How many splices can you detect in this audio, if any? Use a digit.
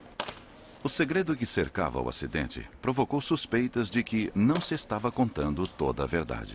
1